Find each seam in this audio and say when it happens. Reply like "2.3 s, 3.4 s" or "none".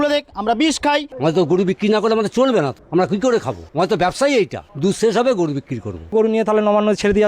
1.1 s, 2.8 s, 3.6 s, 4.6 s, 6.1 s